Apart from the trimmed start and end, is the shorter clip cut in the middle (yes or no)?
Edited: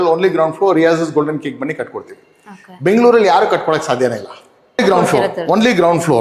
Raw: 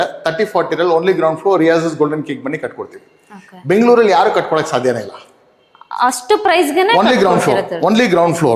yes